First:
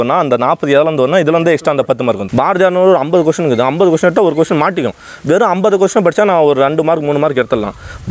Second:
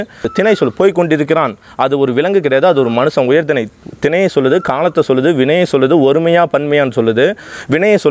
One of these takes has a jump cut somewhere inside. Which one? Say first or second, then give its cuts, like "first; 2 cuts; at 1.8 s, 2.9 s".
first; 1 cut; at 2.2 s